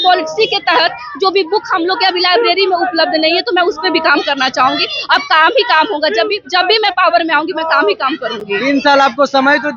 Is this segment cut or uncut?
uncut